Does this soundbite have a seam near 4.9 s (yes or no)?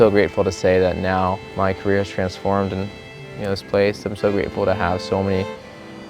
no